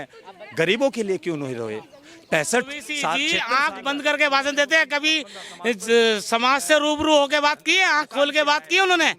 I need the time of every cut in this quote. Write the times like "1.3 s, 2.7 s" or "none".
3.3 s